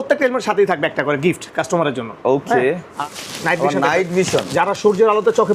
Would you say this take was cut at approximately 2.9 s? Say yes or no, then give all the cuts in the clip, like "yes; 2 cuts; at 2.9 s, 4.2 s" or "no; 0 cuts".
yes; 1 cut; at 2.9 s